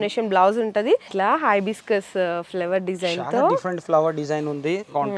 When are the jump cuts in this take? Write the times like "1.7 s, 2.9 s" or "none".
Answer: 1.1 s